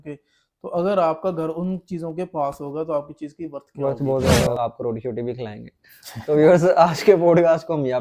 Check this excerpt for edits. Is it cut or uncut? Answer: cut